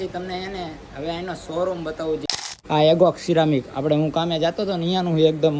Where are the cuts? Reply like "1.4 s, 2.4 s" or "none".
2.3 s